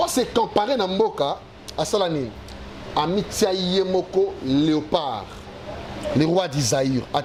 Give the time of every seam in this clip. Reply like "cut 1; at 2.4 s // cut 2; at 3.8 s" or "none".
none